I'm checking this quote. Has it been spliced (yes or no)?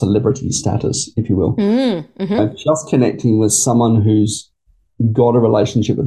no